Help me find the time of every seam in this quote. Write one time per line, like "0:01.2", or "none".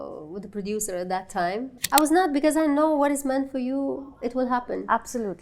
0:01.8